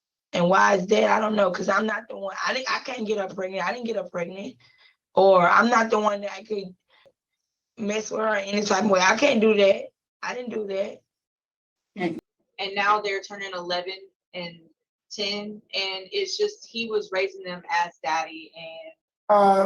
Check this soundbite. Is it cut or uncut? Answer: cut